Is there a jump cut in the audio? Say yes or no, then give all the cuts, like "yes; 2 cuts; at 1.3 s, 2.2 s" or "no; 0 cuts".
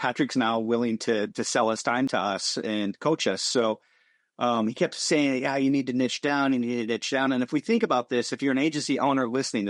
no; 0 cuts